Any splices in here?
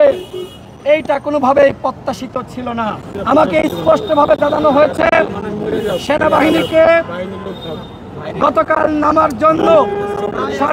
yes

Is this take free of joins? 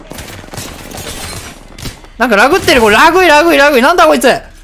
yes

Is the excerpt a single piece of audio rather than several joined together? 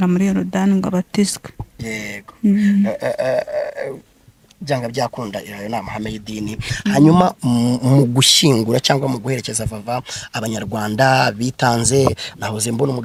yes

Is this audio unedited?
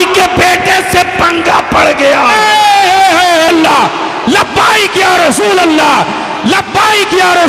no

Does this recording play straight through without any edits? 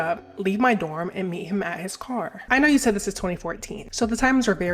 yes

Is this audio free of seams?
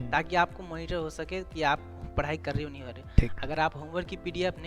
yes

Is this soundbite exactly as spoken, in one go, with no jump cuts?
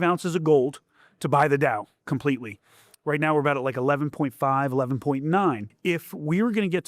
no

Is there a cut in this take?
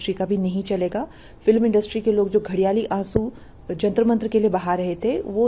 no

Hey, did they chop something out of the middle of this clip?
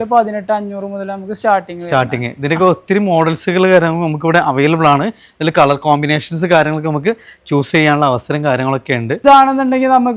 yes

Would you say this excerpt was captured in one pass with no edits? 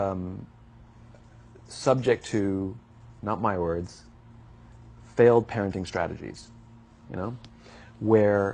no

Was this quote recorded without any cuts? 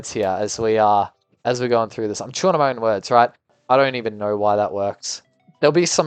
no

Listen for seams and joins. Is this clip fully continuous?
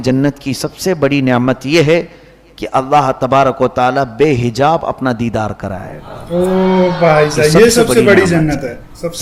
yes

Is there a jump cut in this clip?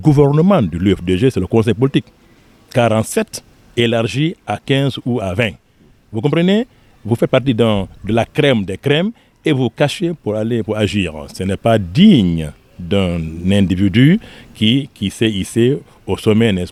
no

